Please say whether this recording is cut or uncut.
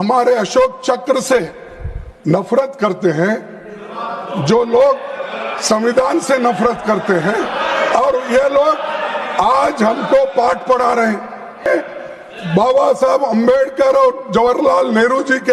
cut